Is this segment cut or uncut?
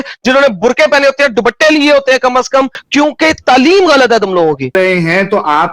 cut